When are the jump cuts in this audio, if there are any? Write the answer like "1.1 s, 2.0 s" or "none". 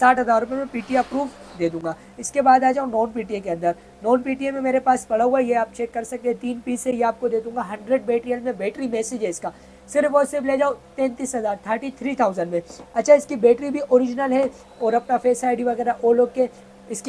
none